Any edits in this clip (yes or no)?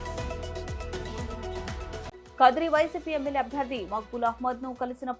no